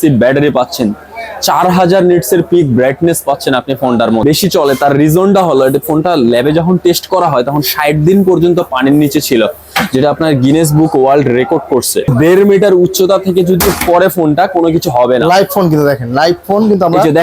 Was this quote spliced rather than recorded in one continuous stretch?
yes; 2 cuts; at 4.2 s, 12.1 s

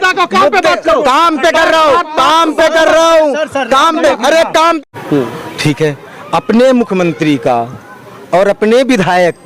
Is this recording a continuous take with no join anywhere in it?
no; 1 cut; at 4.8 s

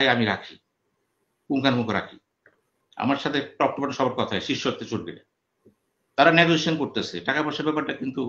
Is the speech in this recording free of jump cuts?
yes; 0 cuts

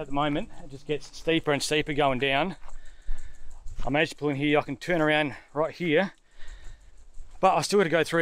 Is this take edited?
no; 0 cuts

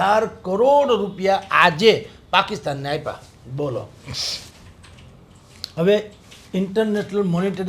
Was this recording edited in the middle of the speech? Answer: no; 0 cuts

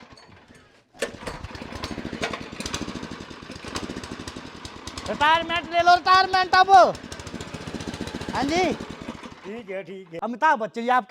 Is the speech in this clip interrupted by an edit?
yes; 1 cut; at 10.2 s

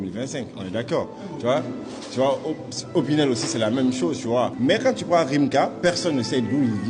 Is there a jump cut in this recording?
yes; 1 cut; at 4.5 s

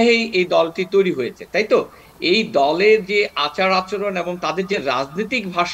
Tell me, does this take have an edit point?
no; 0 cuts

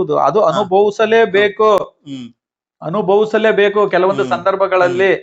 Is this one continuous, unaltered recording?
yes; 0 cuts

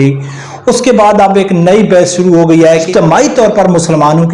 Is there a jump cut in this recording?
yes; 1 cut; at 2.9 s

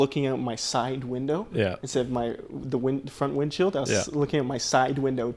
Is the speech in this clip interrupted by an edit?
no; 0 cuts

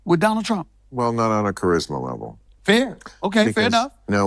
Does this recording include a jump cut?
no; 0 cuts

